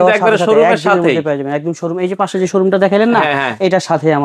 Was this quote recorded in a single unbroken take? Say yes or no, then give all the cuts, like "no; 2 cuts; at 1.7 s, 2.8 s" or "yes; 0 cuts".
yes; 0 cuts